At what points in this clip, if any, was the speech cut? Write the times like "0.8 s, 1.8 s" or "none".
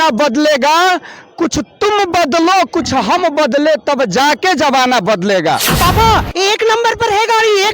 5.7 s